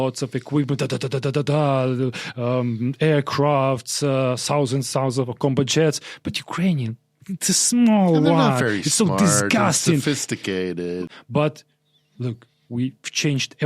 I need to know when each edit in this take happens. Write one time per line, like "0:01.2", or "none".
0:11.1